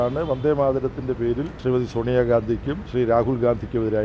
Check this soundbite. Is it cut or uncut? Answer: cut